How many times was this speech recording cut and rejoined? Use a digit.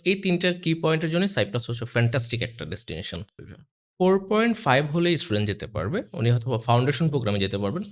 1